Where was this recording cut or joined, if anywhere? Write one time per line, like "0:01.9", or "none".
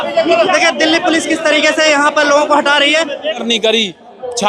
0:03.4